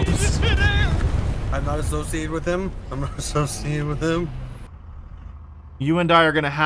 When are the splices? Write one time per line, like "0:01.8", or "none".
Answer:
0:04.2